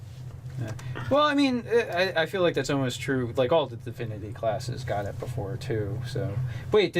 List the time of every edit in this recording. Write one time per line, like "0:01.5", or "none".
0:04.2